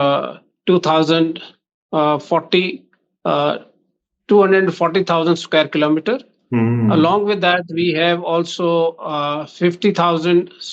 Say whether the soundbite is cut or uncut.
uncut